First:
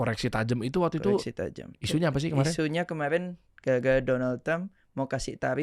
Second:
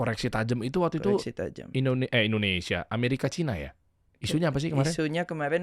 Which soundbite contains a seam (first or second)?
first